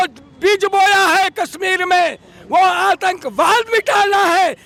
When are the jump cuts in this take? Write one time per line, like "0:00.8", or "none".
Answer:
none

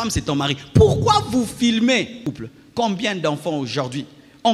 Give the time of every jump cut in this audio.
0:02.2

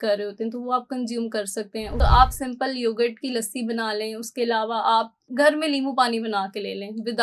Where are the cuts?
0:01.9

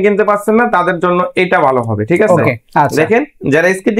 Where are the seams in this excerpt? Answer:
0:02.6

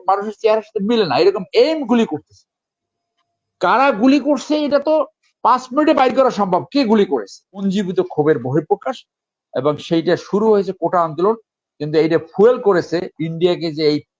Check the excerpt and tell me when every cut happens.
0:07.6

